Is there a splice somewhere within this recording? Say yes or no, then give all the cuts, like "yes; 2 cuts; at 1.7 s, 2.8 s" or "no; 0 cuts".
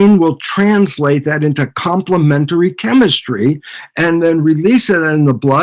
no; 0 cuts